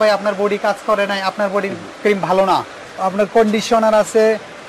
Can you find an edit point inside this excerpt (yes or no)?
yes